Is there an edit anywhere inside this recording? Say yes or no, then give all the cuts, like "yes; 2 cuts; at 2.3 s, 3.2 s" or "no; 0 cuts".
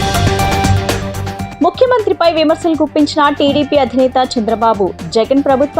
yes; 1 cut; at 1.4 s